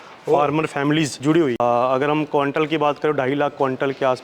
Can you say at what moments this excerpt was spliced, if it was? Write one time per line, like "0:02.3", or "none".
0:01.6